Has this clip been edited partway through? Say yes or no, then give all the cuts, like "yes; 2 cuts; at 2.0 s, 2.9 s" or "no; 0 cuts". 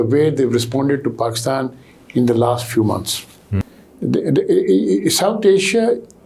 yes; 1 cut; at 3.5 s